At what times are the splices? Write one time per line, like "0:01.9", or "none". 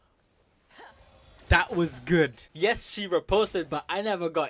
0:02.4